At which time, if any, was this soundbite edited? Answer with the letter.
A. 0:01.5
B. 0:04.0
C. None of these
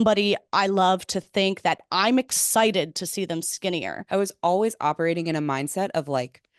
B